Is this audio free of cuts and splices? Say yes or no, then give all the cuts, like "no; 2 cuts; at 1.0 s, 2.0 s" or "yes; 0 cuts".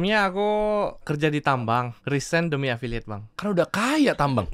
no; 3 cuts; at 1.1 s, 2.0 s, 3.2 s